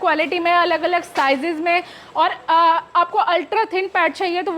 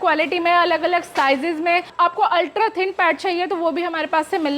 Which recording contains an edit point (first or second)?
second